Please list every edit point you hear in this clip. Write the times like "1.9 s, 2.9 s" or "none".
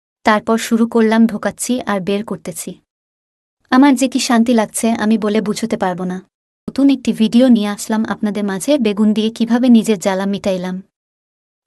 6.7 s